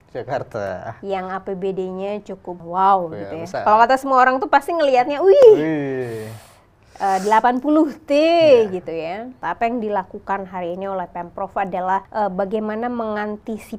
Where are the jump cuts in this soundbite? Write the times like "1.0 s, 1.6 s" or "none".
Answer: 2.6 s, 9.3 s, 12.1 s